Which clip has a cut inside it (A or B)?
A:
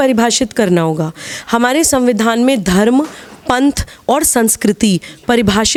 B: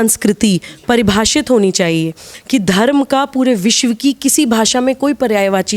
B